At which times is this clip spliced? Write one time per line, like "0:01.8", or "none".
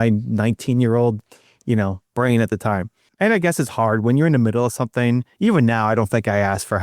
0:03.0